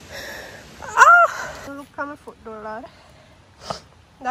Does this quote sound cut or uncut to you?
cut